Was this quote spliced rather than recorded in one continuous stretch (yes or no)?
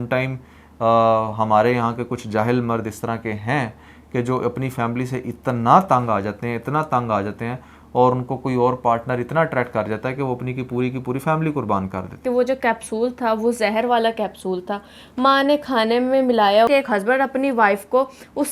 yes